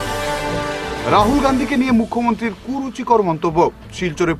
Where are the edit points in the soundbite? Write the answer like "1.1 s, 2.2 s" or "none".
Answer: 1.0 s